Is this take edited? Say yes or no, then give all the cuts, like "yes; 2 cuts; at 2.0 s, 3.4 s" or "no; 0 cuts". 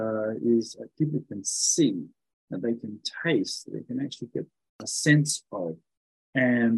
yes; 1 cut; at 4.8 s